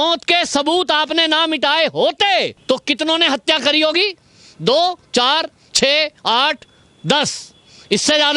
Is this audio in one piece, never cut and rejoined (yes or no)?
no